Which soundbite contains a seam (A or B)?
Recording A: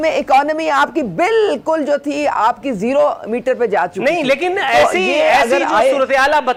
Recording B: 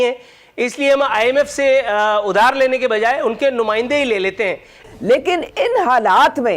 B